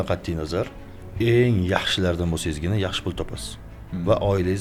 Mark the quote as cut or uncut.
uncut